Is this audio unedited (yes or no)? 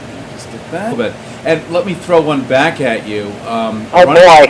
yes